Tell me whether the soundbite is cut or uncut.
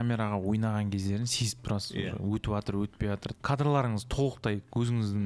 cut